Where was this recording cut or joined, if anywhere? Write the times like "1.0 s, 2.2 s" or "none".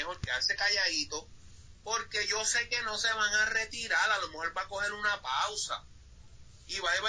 none